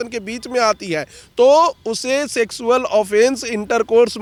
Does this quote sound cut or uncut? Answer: uncut